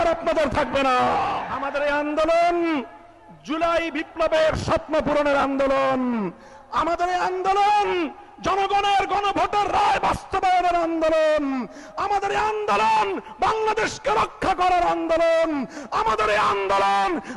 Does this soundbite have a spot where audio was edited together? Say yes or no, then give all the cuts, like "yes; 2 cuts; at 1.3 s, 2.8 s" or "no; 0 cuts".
yes; 1 cut; at 1.5 s